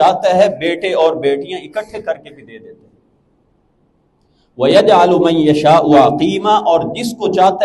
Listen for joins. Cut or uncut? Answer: uncut